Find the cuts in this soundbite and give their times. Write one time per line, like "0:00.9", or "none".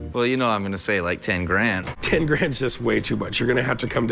0:01.9